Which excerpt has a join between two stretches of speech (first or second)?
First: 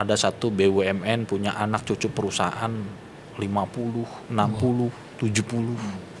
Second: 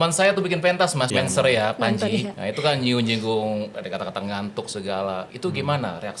second